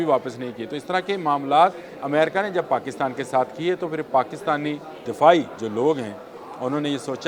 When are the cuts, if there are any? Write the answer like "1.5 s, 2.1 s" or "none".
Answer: 1.9 s, 5.0 s, 5.6 s